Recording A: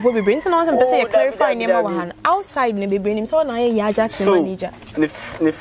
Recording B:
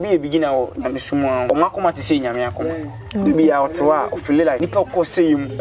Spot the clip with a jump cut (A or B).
B